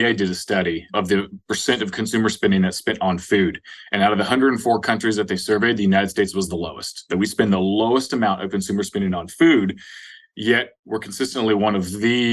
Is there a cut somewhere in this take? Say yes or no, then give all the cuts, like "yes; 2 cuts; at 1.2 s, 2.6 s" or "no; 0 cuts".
yes; 1 cut; at 0.9 s